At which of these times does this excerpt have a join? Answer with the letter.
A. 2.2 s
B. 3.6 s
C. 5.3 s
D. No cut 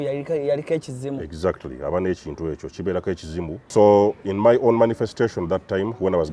B